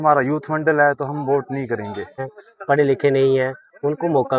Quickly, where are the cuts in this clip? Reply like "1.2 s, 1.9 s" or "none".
2.3 s